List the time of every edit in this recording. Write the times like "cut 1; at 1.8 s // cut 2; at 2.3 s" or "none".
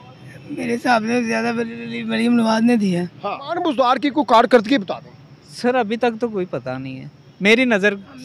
cut 1; at 3.5 s